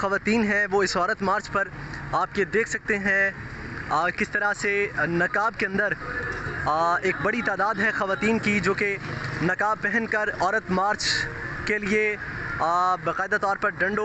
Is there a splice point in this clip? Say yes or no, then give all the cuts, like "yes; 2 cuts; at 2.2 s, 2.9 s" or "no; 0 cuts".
no; 0 cuts